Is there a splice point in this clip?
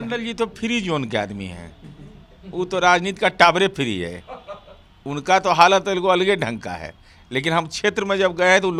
no; 0 cuts

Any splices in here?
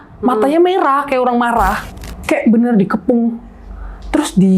yes; 1 cut; at 1.9 s

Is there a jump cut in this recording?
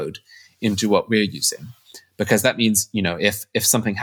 no; 0 cuts

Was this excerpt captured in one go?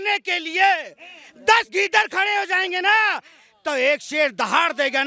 yes; 0 cuts

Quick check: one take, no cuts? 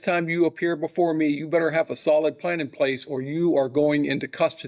yes; 0 cuts

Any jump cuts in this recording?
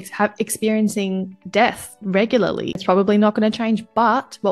yes; 1 cut; at 2.8 s

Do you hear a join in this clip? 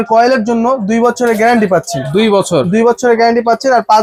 no; 0 cuts

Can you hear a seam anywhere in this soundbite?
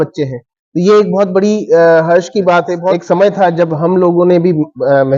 yes; 1 cut; at 2.9 s

